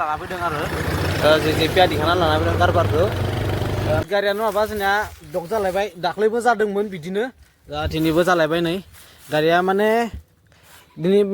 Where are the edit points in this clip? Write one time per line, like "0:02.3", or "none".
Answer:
0:04.0